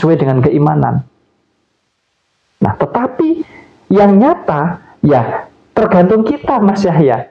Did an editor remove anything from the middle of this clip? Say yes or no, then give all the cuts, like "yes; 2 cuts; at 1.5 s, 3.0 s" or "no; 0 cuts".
no; 0 cuts